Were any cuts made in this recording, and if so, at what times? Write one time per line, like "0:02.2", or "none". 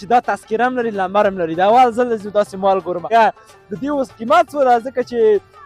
0:03.0